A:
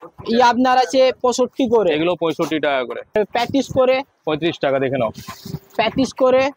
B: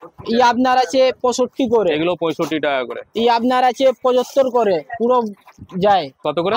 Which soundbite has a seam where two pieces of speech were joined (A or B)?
A